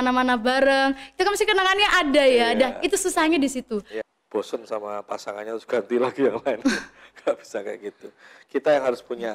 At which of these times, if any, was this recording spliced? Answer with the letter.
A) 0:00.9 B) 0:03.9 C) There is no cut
B